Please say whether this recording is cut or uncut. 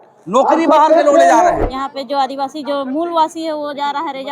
cut